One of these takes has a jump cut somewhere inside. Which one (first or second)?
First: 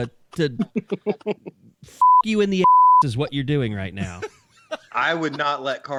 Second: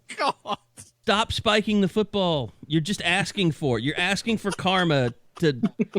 second